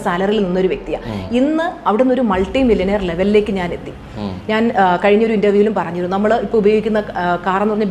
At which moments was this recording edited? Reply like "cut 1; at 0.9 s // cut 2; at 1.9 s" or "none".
none

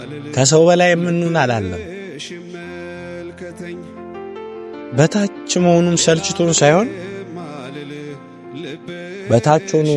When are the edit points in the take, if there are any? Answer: none

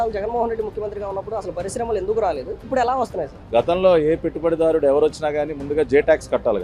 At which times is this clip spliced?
cut 1; at 3.4 s

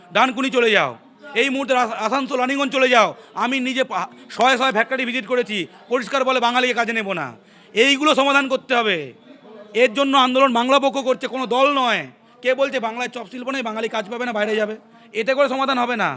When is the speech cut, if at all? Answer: none

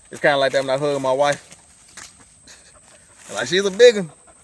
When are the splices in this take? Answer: none

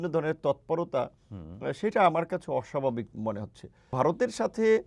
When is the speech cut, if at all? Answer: cut 1; at 3.9 s

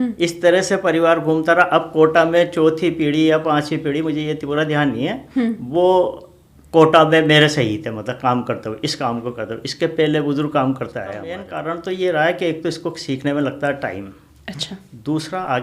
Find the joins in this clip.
cut 1; at 11.5 s

